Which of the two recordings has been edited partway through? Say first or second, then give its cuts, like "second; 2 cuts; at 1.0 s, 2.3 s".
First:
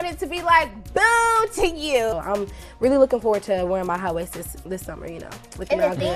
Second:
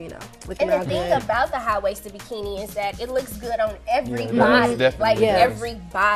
first; 1 cut; at 2.1 s